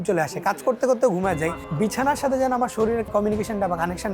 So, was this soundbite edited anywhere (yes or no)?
yes